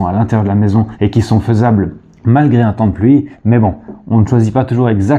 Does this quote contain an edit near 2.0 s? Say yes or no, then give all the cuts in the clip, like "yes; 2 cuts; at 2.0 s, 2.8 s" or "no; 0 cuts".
no; 0 cuts